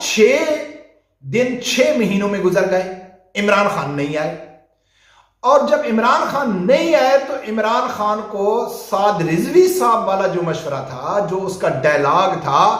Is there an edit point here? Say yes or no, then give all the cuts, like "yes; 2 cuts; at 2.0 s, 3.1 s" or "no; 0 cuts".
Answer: no; 0 cuts